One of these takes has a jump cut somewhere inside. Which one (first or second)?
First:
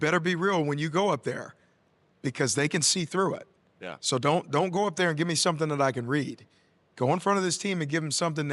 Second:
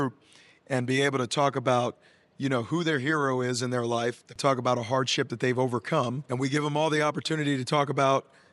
second